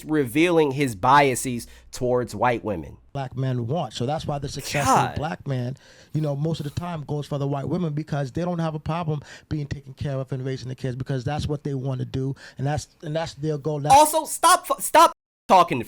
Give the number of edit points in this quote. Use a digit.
1